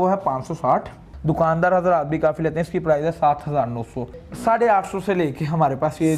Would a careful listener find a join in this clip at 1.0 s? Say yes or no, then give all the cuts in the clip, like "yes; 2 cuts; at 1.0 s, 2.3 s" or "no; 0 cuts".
yes; 2 cuts; at 1.0 s, 4.2 s